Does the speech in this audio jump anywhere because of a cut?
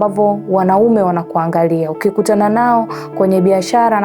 no; 0 cuts

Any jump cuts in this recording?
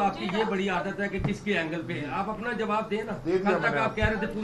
no; 0 cuts

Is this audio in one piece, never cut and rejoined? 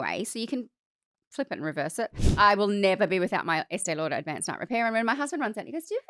no; 1 cut; at 2.2 s

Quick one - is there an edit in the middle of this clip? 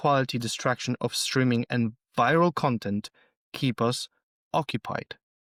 no; 0 cuts

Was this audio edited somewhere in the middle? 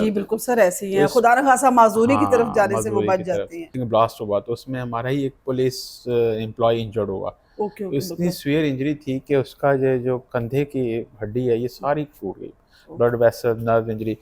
yes; 2 cuts; at 3.7 s, 5.9 s

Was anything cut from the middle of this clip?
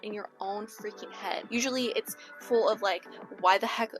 yes; 1 cut; at 1.5 s

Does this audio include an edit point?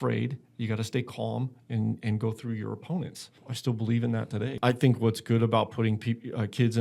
yes; 2 cuts; at 3.4 s, 4.6 s

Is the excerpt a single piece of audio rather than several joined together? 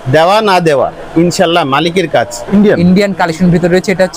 no; 1 cut; at 2.5 s

